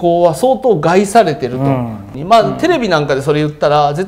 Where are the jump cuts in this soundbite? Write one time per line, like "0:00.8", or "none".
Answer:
0:02.1